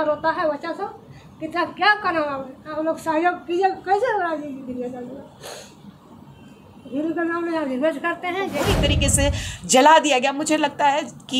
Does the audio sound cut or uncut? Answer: cut